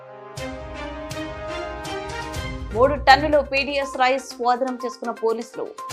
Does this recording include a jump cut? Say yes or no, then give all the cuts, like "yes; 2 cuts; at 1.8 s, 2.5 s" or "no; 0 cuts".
yes; 1 cut; at 2.6 s